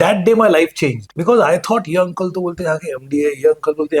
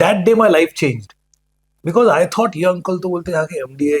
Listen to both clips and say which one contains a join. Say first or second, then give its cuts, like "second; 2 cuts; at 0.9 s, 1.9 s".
first; 1 cut; at 1.1 s